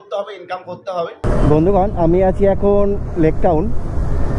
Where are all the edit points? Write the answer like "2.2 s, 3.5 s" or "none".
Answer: 1.2 s